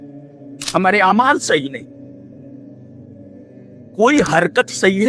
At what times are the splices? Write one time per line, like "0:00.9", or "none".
0:02.4
0:04.0